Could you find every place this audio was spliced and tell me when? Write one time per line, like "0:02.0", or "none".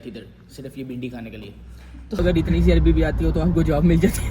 0:02.2